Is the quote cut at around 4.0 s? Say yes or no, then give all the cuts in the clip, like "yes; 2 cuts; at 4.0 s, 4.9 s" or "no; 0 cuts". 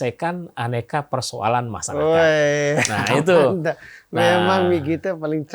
no; 0 cuts